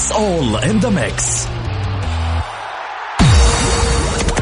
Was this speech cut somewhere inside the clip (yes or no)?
yes